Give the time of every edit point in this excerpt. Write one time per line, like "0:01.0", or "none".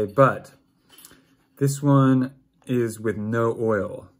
none